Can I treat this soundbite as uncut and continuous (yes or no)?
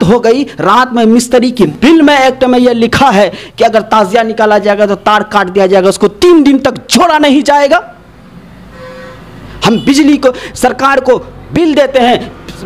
no